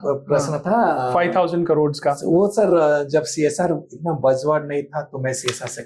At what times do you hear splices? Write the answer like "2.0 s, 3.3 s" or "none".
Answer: none